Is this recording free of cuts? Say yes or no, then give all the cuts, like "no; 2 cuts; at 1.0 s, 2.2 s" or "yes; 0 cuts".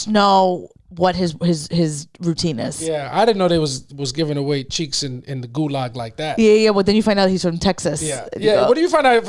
yes; 0 cuts